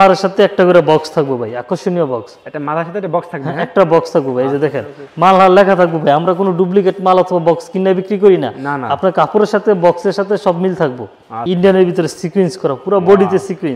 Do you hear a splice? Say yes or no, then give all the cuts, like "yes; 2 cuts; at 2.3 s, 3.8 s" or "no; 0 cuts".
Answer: yes; 1 cut; at 11.4 s